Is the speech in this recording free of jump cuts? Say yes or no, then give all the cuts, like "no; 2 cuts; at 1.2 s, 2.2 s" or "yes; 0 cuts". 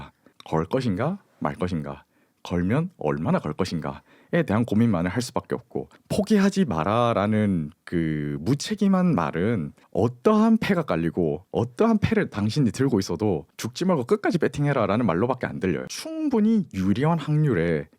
no; 2 cuts; at 6.0 s, 15.9 s